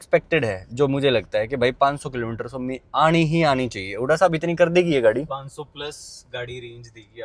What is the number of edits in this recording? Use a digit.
0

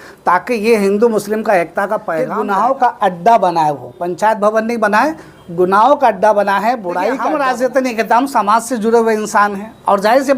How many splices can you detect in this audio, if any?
2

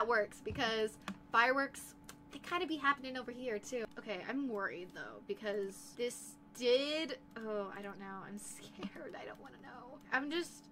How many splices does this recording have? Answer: 1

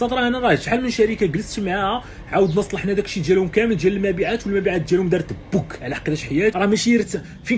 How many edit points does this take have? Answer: 1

